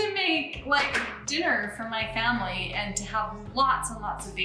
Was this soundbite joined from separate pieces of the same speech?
yes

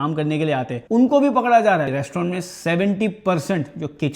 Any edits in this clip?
no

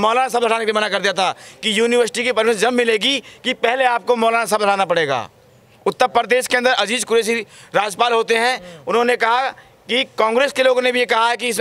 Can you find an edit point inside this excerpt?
no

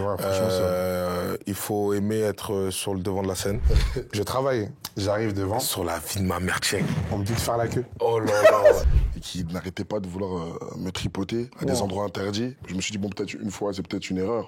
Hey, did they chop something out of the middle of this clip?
yes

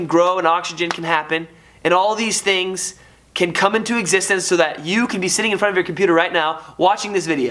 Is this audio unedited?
yes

